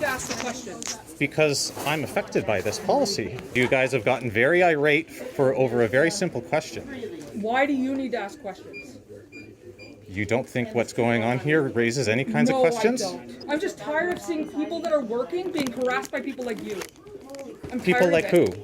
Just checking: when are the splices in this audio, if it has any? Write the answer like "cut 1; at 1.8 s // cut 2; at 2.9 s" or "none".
cut 1; at 3.5 s // cut 2; at 13.3 s